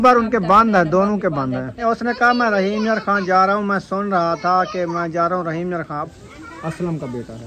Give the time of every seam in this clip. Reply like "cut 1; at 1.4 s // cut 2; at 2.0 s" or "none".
cut 1; at 1.8 s // cut 2; at 6.1 s